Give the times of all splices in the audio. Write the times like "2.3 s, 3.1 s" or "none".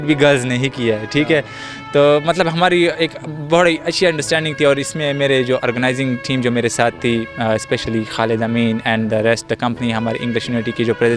none